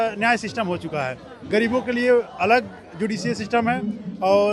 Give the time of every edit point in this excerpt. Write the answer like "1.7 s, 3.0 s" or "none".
none